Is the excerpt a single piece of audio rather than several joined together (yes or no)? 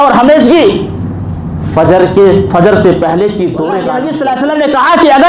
no